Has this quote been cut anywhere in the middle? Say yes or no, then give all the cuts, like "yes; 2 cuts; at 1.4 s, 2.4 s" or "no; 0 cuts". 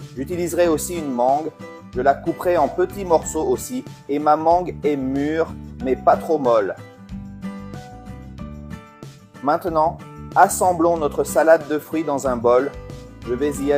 no; 0 cuts